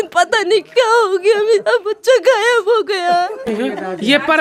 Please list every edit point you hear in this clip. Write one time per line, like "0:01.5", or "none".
0:03.5